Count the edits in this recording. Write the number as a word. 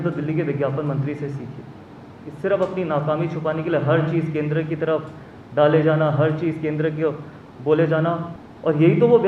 one